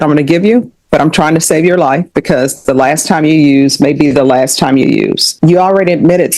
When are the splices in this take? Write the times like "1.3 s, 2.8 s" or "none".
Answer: 5.2 s